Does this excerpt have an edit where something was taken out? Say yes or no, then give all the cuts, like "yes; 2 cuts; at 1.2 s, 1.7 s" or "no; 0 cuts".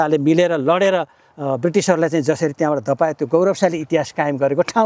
no; 0 cuts